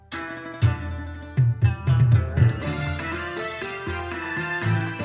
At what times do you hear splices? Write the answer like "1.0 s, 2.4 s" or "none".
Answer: 3.1 s